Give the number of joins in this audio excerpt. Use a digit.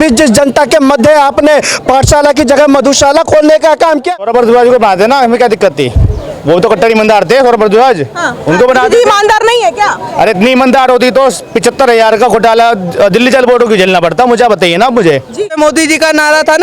2